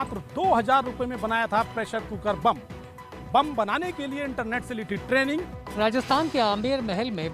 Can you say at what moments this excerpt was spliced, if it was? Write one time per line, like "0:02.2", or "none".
0:05.6